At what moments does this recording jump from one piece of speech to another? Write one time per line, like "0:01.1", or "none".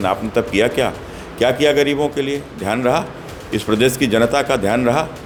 none